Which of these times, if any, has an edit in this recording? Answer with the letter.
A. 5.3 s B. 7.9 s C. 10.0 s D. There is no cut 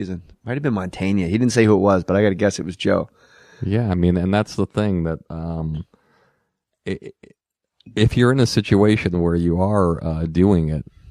C